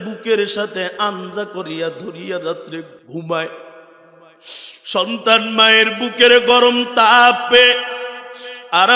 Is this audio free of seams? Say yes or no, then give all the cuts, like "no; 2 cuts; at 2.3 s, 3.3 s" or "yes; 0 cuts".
no; 1 cut; at 3.0 s